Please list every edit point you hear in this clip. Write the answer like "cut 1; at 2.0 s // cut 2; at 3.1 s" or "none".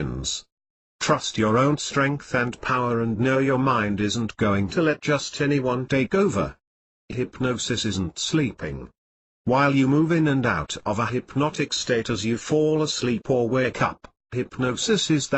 cut 1; at 4.5 s